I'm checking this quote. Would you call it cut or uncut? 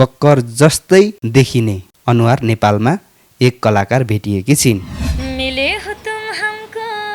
cut